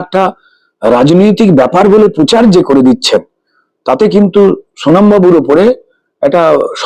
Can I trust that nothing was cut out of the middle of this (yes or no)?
yes